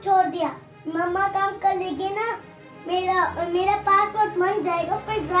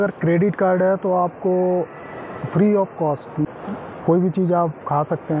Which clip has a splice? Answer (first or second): second